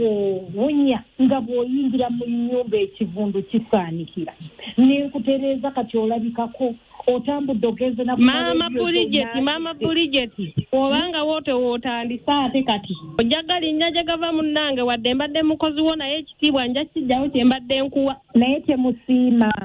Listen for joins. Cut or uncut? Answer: uncut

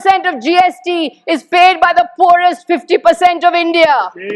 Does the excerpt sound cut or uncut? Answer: uncut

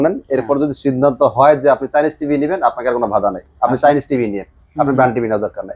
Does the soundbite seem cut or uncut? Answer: uncut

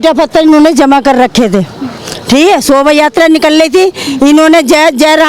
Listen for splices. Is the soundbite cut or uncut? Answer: uncut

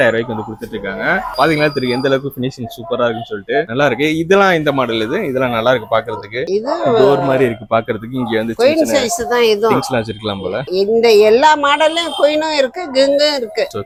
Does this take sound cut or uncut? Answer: uncut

